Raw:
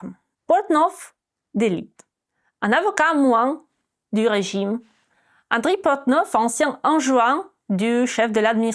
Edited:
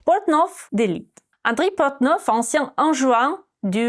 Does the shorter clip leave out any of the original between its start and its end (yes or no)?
yes